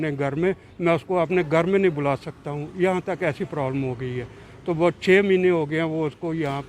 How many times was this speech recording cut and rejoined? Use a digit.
0